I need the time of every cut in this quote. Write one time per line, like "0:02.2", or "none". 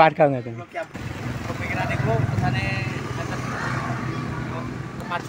0:01.0